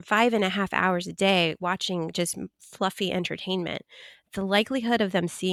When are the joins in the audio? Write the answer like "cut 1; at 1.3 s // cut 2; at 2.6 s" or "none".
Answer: none